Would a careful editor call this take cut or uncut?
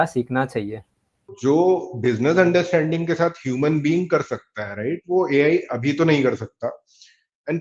cut